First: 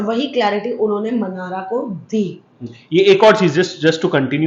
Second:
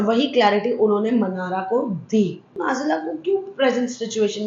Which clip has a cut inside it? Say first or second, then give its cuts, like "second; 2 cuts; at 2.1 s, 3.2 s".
second; 1 cut; at 2.5 s